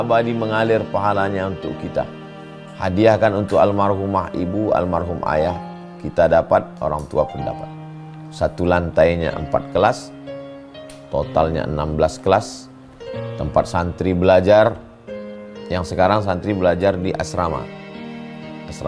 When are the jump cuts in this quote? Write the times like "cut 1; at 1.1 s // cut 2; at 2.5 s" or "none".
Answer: none